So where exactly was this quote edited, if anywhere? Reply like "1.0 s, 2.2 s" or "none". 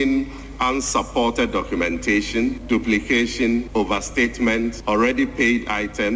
2.6 s, 3.7 s, 4.8 s